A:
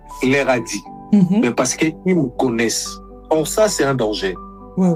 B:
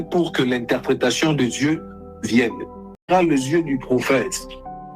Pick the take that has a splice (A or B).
B